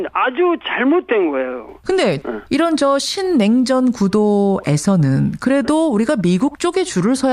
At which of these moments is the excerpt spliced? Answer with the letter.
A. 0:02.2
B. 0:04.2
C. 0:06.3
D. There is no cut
B